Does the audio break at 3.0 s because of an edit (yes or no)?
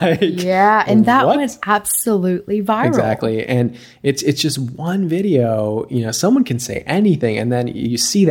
yes